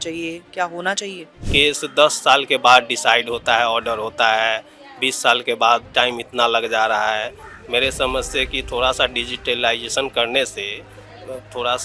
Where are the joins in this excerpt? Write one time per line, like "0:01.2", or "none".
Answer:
0:01.4